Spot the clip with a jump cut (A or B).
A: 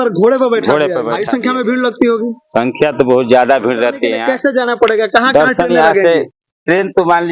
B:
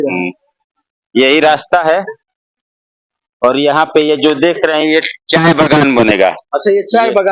A